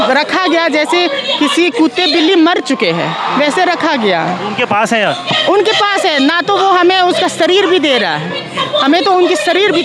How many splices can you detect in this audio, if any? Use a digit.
0